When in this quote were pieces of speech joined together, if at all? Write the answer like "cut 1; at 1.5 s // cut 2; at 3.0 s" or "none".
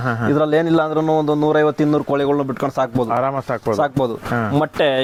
none